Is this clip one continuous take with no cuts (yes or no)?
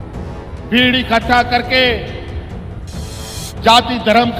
no